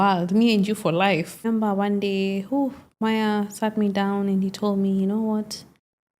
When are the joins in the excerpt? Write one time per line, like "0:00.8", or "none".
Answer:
0:01.5